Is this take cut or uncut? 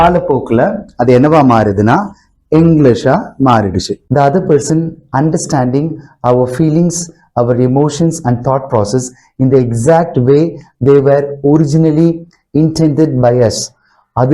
cut